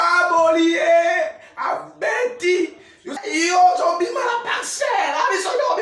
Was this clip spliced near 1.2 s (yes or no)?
no